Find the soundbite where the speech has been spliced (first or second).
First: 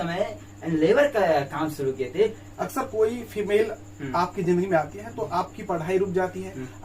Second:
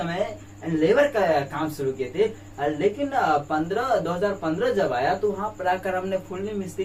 first